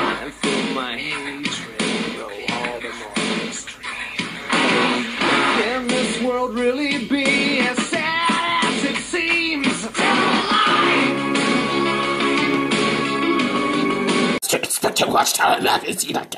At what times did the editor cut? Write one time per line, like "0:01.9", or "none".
0:13.0